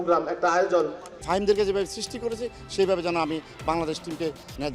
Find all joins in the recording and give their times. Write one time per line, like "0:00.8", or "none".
0:01.1